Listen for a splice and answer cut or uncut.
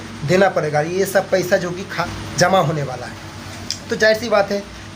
cut